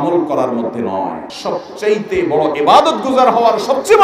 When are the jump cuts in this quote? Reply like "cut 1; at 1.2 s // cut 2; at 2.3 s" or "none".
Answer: cut 1; at 1.3 s